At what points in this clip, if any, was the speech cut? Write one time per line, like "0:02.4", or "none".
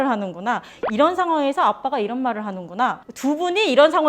0:03.1